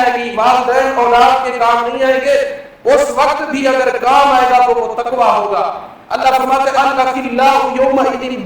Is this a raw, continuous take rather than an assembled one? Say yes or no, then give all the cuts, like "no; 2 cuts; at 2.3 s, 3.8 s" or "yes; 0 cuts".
yes; 0 cuts